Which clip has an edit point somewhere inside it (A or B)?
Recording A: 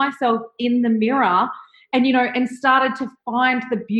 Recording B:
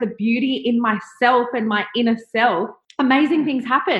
B